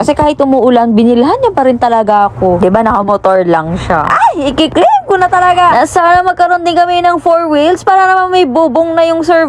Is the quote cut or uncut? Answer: uncut